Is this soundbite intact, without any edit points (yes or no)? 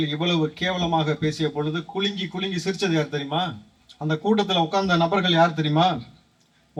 yes